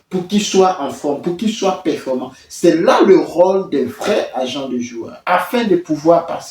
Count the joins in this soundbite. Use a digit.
1